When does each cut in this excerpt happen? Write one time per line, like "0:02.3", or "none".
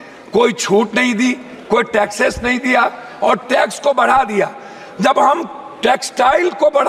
none